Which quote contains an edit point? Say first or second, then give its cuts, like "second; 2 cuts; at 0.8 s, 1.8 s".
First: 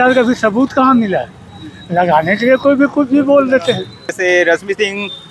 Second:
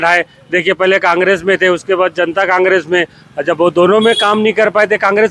first; 1 cut; at 4.2 s